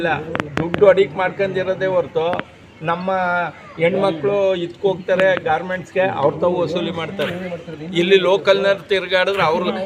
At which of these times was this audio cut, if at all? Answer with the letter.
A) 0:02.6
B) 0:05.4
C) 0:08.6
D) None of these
D